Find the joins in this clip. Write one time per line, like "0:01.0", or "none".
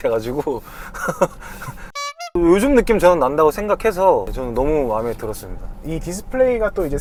none